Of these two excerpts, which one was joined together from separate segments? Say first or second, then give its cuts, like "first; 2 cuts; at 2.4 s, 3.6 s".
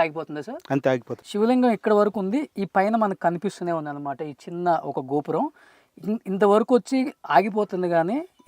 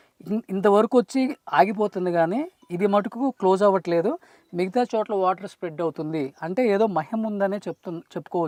first; 1 cut; at 1.1 s